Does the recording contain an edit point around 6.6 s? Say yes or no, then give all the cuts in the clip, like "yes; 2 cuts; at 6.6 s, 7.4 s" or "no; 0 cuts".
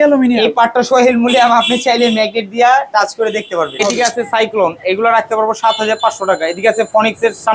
no; 1 cut; at 3.8 s